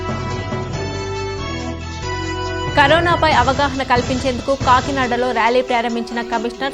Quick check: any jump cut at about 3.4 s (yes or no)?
no